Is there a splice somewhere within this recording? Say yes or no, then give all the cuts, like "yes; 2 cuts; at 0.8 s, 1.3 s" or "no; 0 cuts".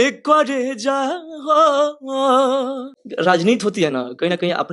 yes; 1 cut; at 3.0 s